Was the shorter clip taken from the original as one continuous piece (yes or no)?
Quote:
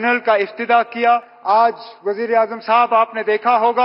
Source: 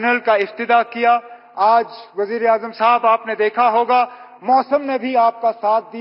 no